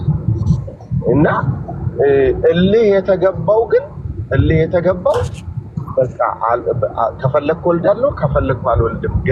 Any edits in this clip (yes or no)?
no